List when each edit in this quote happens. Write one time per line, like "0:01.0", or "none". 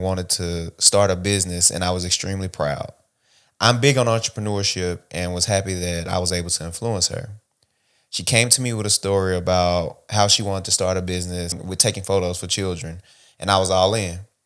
0:11.6